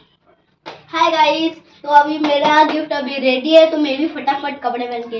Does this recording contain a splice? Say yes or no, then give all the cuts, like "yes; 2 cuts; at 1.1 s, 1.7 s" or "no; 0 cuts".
no; 0 cuts